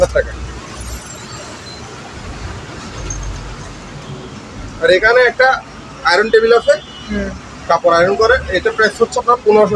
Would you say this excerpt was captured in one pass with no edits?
yes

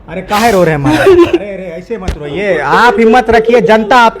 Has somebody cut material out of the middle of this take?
no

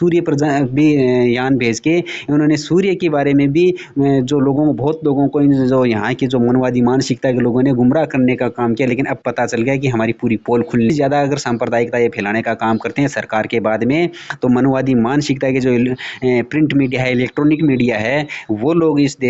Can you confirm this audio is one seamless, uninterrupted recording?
no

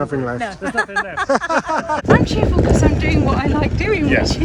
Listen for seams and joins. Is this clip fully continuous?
no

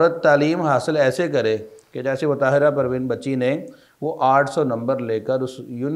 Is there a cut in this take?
no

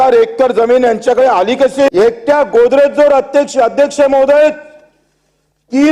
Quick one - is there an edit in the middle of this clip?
yes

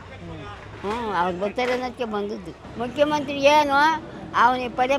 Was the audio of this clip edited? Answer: yes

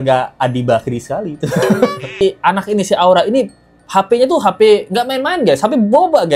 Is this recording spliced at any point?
yes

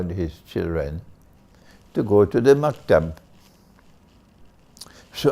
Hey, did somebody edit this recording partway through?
no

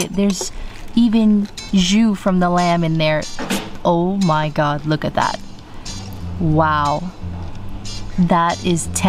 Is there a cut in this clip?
no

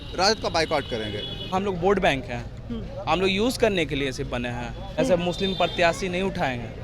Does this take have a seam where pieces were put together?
yes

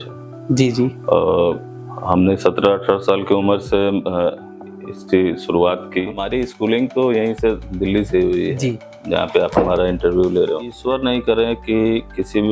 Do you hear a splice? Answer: yes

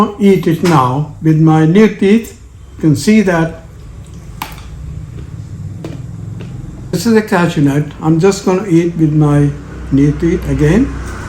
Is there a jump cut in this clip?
yes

